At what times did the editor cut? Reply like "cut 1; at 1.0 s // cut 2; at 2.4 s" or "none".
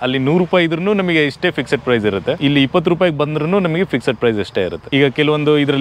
cut 1; at 2.4 s // cut 2; at 4.8 s